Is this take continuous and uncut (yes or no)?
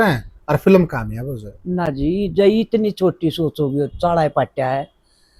yes